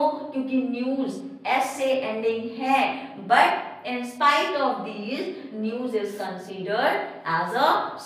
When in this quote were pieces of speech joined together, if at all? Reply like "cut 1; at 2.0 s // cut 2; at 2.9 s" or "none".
none